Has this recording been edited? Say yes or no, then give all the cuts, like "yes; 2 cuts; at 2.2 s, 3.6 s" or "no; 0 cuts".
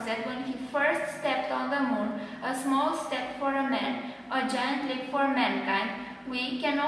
yes; 1 cut; at 3.2 s